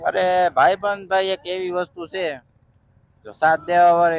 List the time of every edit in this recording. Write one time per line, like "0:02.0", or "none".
none